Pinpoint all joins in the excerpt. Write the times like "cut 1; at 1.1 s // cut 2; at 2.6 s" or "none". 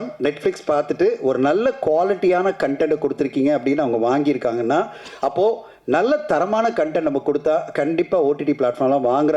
none